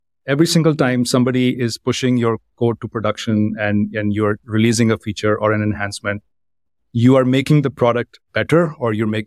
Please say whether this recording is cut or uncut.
uncut